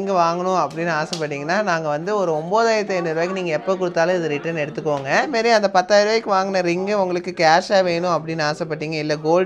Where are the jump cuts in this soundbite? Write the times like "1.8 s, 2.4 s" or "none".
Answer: 5.3 s